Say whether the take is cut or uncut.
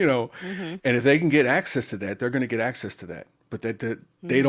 uncut